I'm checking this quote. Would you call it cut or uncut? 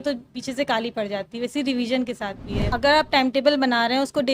cut